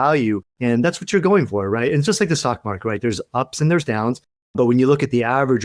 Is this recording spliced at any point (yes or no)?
no